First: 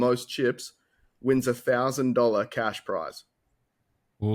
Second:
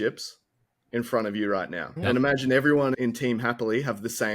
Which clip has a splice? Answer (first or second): second